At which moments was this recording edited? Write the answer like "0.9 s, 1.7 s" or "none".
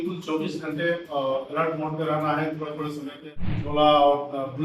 3.3 s